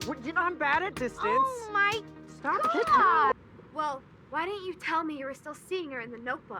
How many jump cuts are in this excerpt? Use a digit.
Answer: 1